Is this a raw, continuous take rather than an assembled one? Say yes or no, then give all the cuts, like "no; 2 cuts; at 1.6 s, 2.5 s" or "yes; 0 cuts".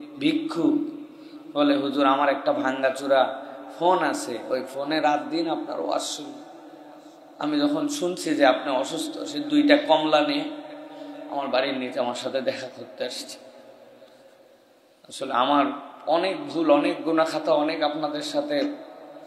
yes; 0 cuts